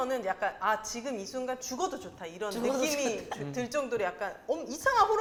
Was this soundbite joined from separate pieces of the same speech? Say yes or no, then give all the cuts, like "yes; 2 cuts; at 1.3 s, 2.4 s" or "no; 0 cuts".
no; 0 cuts